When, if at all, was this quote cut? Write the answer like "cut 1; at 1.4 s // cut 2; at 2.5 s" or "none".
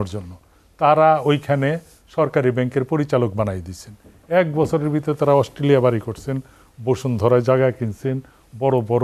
none